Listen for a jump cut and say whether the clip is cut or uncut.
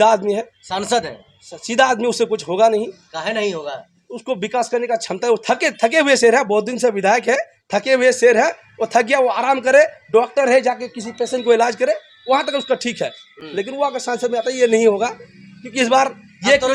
uncut